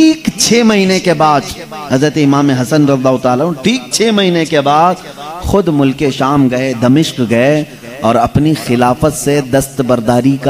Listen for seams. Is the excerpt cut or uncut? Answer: uncut